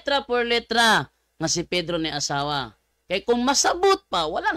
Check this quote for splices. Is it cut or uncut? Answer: uncut